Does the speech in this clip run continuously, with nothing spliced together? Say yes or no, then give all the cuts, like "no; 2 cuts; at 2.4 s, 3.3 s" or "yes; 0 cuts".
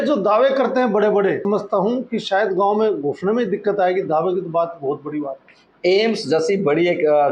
no; 1 cut; at 1.4 s